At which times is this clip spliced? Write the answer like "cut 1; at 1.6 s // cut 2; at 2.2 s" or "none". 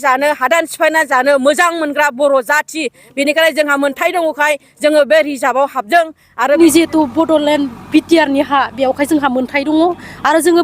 cut 1; at 6.6 s